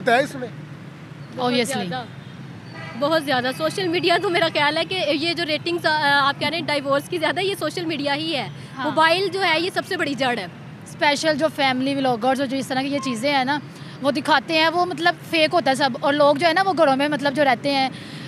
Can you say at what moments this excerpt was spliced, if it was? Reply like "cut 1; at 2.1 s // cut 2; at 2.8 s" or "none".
none